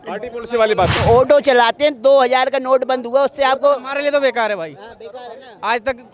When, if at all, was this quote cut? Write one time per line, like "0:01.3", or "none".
0:00.9